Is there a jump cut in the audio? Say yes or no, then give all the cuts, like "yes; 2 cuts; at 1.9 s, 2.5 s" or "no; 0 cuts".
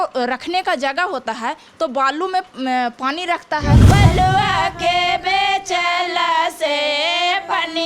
yes; 1 cut; at 3.8 s